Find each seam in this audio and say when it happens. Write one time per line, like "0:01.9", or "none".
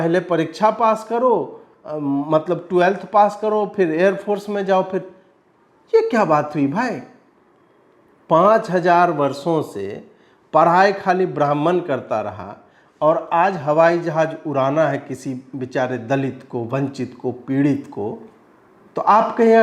none